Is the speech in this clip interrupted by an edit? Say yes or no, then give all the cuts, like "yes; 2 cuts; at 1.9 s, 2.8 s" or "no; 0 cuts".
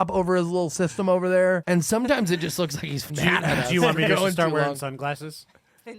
yes; 2 cuts; at 1.6 s, 3.0 s